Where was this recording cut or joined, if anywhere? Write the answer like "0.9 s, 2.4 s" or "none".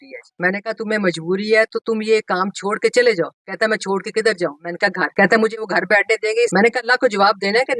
6.5 s

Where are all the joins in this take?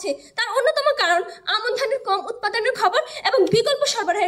none

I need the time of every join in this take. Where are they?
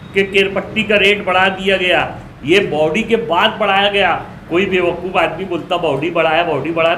none

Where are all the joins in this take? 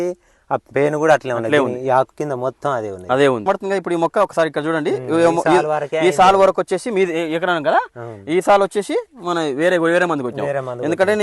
3.5 s

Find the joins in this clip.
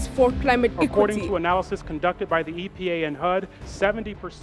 0.9 s

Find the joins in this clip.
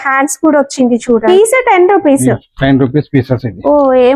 1.2 s

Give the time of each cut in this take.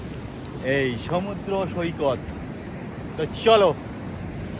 none

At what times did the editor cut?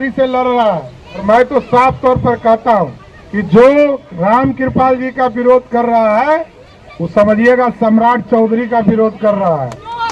none

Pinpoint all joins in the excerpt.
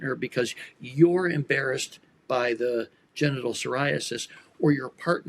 none

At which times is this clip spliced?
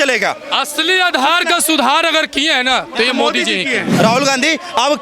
3.9 s

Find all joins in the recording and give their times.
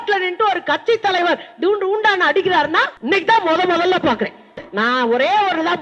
2.9 s, 4.6 s

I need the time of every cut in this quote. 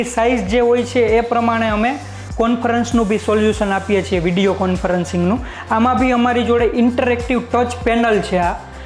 none

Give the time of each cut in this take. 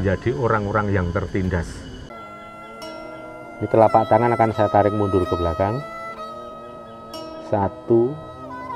2.1 s

